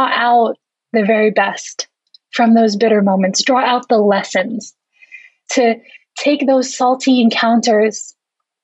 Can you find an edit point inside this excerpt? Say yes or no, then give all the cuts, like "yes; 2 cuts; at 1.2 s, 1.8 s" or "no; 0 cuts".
no; 0 cuts